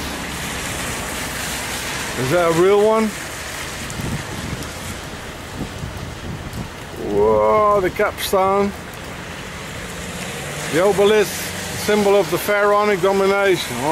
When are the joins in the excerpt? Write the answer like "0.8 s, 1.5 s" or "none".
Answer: 9.8 s